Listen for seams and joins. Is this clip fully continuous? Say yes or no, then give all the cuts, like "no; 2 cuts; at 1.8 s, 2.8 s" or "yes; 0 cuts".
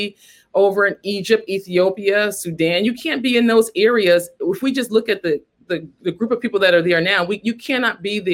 yes; 0 cuts